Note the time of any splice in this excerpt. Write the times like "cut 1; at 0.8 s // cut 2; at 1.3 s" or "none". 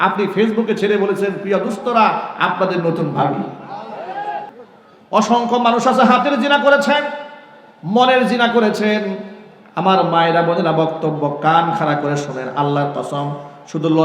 cut 1; at 4.5 s